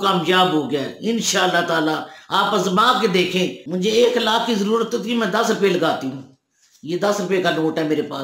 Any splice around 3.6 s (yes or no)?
yes